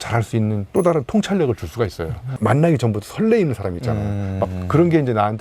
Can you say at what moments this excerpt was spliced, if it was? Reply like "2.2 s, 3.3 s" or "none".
2.2 s